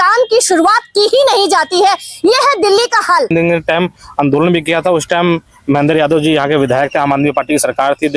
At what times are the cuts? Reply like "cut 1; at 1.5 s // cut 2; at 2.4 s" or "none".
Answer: cut 1; at 3.3 s